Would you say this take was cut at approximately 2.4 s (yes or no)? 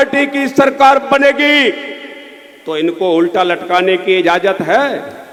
no